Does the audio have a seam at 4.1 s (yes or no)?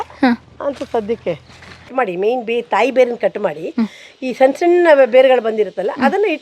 no